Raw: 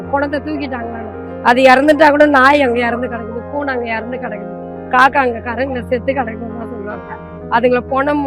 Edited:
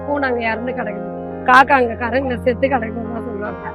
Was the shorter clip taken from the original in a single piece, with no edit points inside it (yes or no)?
yes